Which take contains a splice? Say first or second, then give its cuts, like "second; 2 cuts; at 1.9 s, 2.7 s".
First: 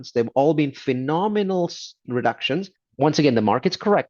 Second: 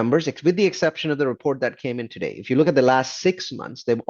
first; 1 cut; at 2.8 s